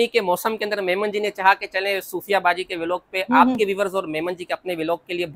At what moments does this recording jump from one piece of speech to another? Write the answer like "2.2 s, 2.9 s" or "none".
none